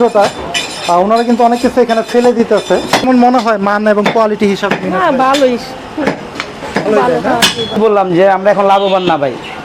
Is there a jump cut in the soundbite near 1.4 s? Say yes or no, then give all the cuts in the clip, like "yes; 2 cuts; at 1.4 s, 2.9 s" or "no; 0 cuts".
no; 2 cuts; at 3.0 s, 7.7 s